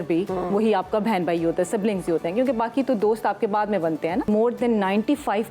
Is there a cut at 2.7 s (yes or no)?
no